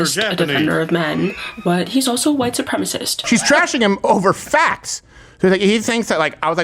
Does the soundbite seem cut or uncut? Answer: cut